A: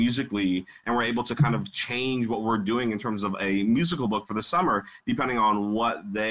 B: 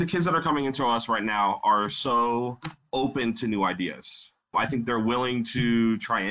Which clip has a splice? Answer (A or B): B